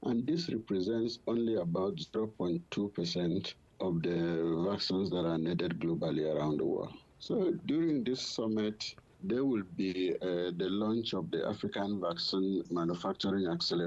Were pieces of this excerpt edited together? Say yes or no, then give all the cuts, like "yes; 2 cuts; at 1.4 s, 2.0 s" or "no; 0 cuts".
yes; 3 cuts; at 7.6 s, 9.1 s, 12.7 s